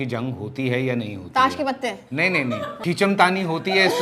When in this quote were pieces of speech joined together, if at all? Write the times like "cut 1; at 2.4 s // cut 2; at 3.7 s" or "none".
cut 1; at 2.7 s